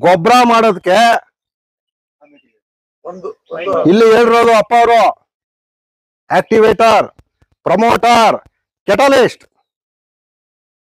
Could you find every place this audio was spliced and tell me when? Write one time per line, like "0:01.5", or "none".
none